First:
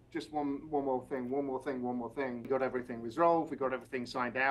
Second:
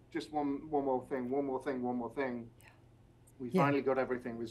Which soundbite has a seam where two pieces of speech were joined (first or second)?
first